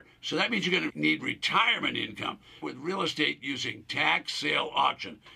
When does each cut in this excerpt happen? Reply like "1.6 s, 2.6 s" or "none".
0.9 s, 2.6 s

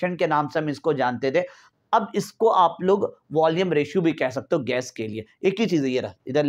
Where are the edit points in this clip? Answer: none

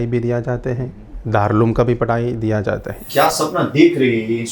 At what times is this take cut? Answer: 3.0 s

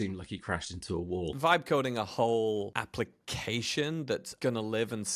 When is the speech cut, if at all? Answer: 1.3 s, 2.7 s, 4.3 s

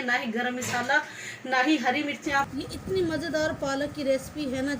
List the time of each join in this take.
2.5 s

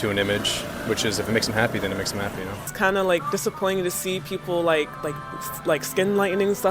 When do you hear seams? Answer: 2.6 s

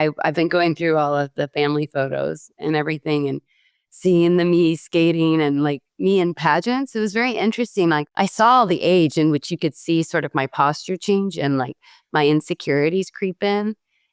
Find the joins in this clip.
8.0 s

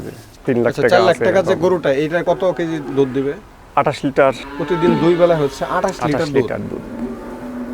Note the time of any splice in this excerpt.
2.2 s, 4.5 s

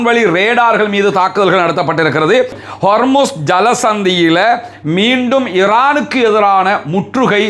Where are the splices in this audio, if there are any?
2.6 s

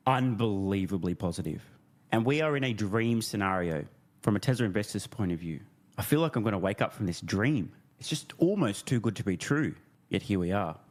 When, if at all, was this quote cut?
none

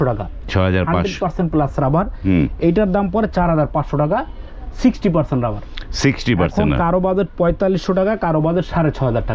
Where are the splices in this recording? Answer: none

